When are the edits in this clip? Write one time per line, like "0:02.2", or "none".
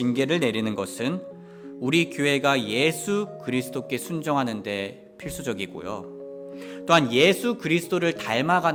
none